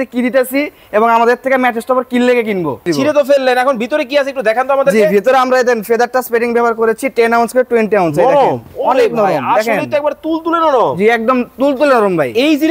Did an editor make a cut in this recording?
yes; 1 cut; at 2.9 s

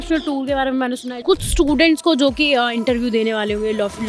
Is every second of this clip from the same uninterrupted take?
no; 1 cut; at 1.1 s

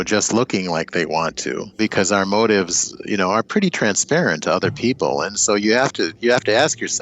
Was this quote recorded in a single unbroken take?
no; 1 cut; at 1.8 s

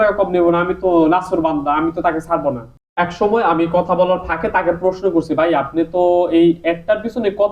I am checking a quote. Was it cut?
yes; 1 cut; at 2.8 s

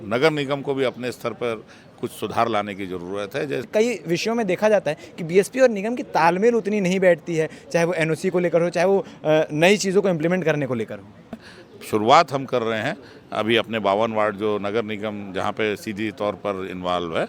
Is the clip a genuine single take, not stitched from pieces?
no; 2 cuts; at 3.7 s, 11.5 s

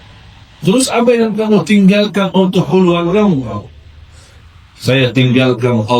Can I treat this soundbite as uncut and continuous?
yes; 0 cuts

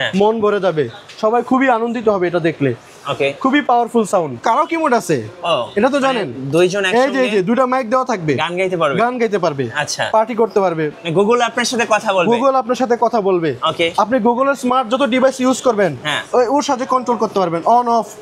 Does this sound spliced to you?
yes; 2 cuts; at 4.4 s, 11.0 s

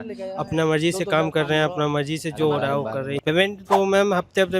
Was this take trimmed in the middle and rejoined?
yes; 1 cut; at 3.1 s

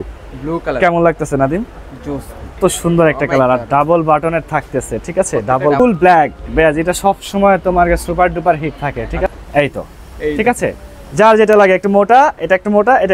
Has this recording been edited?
yes; 3 cuts; at 2.6 s, 5.8 s, 9.3 s

